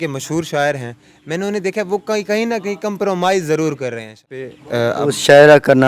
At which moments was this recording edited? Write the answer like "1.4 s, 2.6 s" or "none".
4.6 s